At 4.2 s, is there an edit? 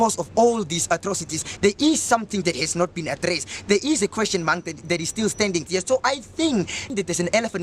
no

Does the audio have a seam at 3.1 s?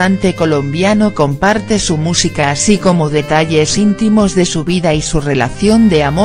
no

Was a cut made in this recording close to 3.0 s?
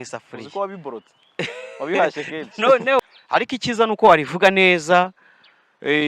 yes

